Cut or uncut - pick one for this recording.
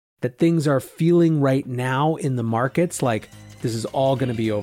cut